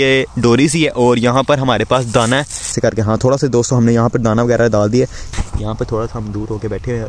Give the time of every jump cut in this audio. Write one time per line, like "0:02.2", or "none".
0:02.7
0:05.3